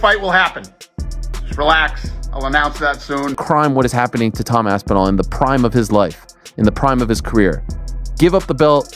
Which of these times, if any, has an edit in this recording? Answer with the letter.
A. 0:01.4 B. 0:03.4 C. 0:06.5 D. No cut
B